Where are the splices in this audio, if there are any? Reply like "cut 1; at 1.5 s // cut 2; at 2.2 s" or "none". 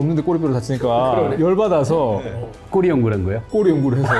cut 1; at 1.3 s